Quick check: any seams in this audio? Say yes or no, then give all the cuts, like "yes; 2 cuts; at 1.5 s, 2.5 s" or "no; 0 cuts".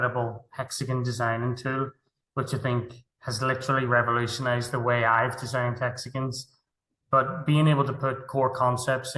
no; 0 cuts